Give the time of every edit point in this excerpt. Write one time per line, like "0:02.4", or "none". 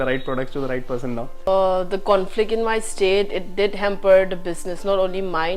0:01.5